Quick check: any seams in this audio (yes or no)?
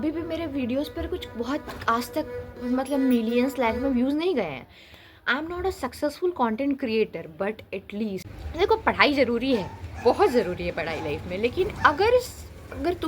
yes